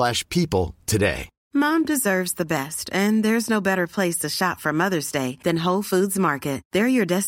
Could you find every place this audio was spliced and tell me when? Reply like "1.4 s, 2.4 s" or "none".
1.3 s